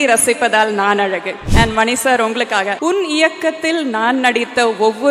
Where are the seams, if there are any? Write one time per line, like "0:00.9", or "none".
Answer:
0:01.4
0:02.8